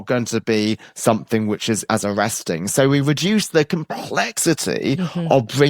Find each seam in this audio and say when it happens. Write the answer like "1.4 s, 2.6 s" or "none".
1.8 s